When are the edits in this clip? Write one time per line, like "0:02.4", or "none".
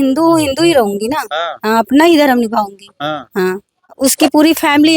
0:03.9